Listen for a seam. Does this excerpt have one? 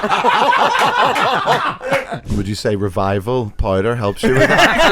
yes; 1 cut; at 2.2 s

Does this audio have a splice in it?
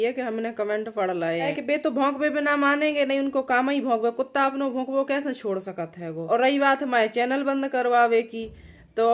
yes; 2 cuts; at 1.5 s, 6.2 s

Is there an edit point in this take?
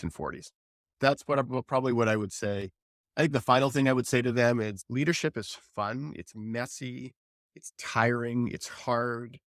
yes; 1 cut; at 0.9 s

